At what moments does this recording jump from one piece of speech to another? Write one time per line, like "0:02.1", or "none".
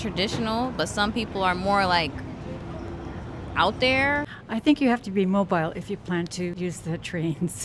0:04.3
0:06.5